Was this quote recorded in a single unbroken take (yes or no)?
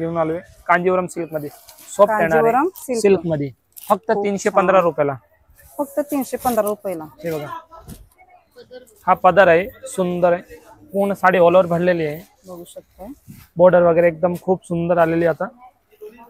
yes